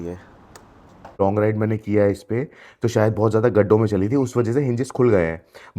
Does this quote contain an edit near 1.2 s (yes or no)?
yes